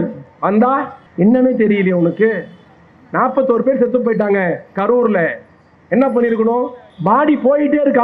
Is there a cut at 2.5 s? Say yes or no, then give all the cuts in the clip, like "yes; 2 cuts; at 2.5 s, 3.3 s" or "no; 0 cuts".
no; 2 cuts; at 1.0 s, 6.8 s